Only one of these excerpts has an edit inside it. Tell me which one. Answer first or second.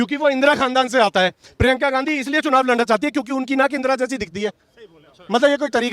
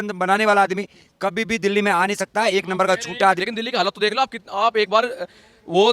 second